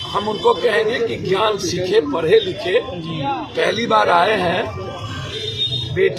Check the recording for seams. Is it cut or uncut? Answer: uncut